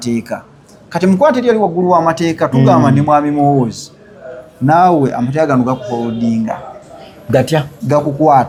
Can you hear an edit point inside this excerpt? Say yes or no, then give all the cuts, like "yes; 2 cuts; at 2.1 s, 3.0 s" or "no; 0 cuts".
no; 0 cuts